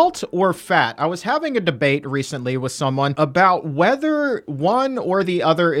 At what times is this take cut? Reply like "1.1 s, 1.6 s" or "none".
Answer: 3.1 s